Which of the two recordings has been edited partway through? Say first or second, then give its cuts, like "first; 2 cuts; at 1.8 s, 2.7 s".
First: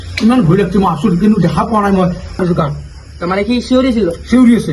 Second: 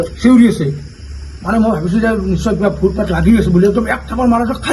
first; 1 cut; at 2.4 s